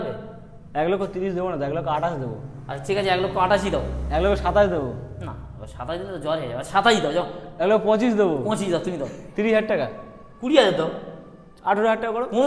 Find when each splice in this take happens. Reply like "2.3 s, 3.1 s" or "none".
9.2 s